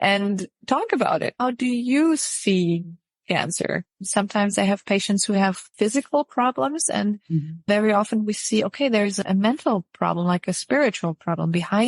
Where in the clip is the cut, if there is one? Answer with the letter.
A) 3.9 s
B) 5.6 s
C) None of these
B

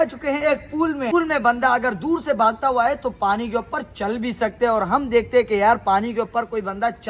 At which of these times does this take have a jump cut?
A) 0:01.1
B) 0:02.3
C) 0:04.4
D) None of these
A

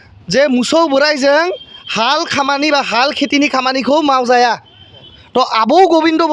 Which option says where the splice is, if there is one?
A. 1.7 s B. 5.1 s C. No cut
B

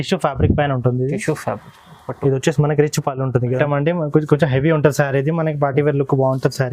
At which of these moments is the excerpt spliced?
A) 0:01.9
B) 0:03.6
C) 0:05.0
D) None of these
B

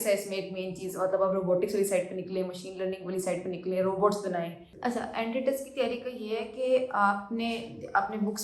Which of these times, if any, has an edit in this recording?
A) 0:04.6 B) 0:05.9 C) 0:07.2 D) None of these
A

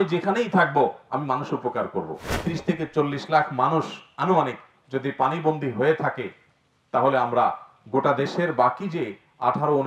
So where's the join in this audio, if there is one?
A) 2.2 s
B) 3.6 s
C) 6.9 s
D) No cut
A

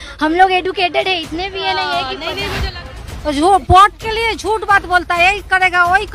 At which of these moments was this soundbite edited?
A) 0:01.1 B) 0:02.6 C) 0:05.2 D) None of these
B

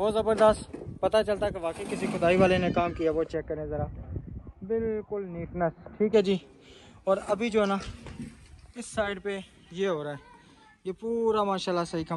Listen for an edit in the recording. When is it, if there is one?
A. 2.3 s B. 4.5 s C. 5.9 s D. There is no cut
D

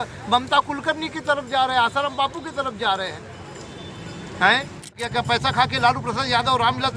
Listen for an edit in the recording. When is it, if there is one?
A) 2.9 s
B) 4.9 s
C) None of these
B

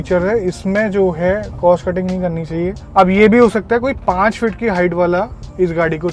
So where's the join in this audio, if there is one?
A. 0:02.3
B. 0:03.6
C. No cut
C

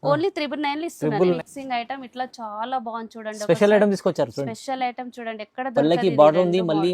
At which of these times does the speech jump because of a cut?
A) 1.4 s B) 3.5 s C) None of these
A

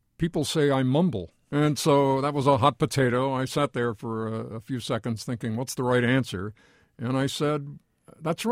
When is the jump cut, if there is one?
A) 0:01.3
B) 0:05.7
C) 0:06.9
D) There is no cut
A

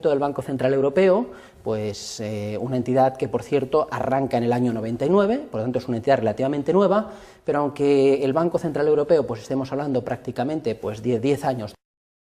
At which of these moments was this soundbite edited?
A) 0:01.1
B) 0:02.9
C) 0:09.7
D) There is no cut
C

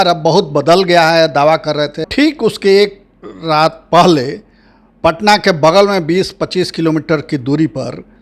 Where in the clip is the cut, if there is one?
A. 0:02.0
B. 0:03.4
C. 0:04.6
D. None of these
A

